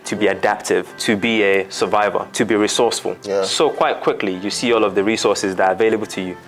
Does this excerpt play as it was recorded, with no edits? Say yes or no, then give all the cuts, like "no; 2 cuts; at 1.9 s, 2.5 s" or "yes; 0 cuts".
no; 1 cut; at 0.9 s